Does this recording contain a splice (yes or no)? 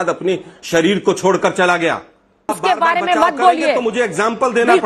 yes